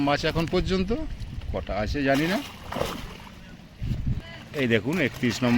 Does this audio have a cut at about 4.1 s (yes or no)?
yes